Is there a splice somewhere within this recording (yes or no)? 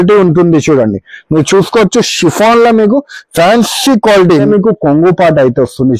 yes